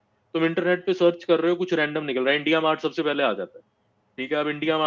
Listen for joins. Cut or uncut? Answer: uncut